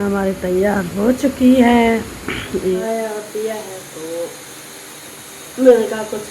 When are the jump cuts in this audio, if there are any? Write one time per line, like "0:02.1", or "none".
0:02.8